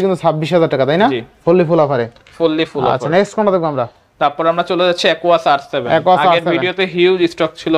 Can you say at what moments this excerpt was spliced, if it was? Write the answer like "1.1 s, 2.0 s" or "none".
none